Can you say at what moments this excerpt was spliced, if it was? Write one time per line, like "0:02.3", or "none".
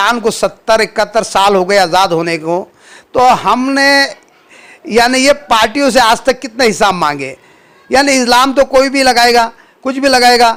none